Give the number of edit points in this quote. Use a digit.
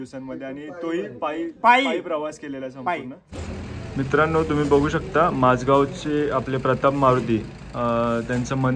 1